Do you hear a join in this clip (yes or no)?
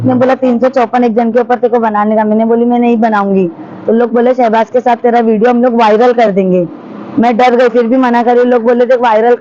no